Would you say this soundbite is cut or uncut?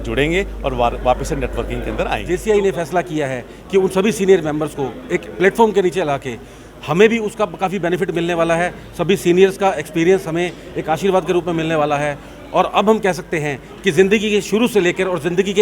cut